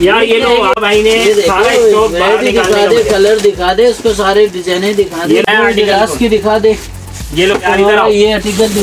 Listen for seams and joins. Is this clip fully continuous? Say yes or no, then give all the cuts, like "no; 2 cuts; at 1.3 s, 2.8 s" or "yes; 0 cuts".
no; 2 cuts; at 0.8 s, 5.5 s